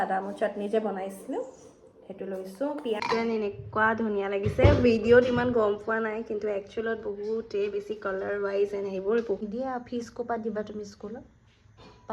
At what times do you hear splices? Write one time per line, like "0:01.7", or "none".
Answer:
0:03.0
0:09.4